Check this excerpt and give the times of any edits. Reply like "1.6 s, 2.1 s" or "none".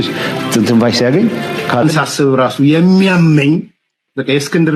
1.8 s